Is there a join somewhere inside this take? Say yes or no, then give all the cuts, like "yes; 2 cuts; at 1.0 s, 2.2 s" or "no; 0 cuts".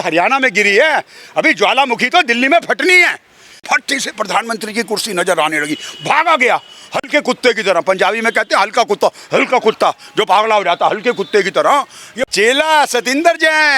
yes; 2 cuts; at 3.5 s, 12.3 s